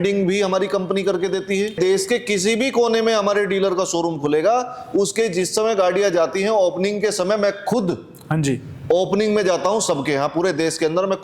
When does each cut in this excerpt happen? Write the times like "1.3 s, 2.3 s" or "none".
1.8 s

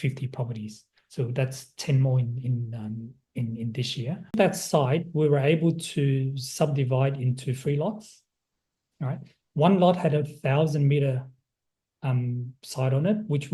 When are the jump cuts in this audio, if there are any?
4.4 s

